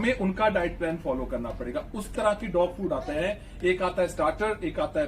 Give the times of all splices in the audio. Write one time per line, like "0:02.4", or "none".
0:02.1